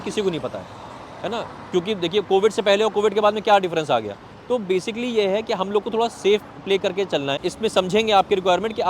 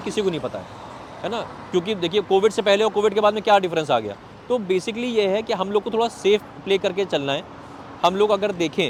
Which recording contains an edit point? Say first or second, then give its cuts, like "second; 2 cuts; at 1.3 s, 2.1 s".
first; 1 cut; at 7.4 s